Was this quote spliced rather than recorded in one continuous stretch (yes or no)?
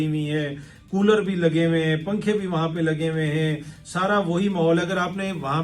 no